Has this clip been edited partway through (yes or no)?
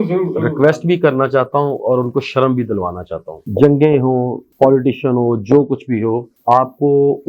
yes